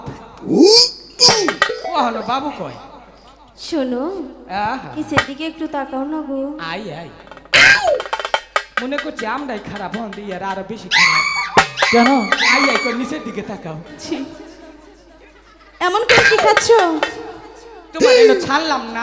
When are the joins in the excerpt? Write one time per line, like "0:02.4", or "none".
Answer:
0:14.0